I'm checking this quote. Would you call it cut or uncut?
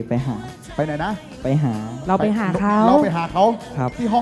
uncut